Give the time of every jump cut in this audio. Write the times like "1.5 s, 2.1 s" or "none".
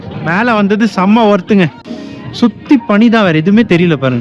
none